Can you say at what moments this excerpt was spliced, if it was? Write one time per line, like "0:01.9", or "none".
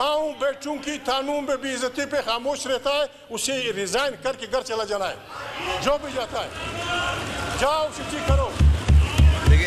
none